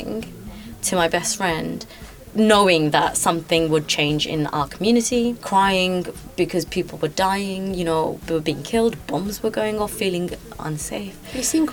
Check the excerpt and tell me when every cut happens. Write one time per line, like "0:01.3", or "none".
0:05.4